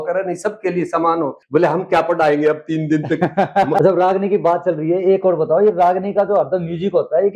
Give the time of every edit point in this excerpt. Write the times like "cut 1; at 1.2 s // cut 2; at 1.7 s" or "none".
cut 1; at 1.4 s // cut 2; at 3.8 s